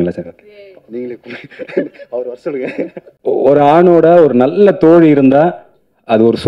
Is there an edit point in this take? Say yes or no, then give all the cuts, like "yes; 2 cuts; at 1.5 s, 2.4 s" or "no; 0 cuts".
yes; 1 cut; at 3.1 s